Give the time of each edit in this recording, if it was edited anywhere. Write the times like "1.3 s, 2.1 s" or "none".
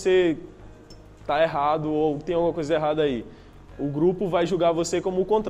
none